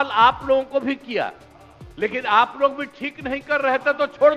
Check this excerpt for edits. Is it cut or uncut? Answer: uncut